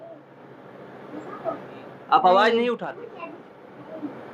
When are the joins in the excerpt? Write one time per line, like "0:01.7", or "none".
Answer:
0:02.8